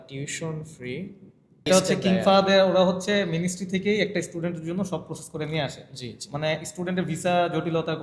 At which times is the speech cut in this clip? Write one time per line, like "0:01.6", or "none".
0:01.7